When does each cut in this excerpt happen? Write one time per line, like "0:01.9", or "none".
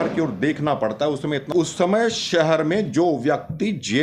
0:01.5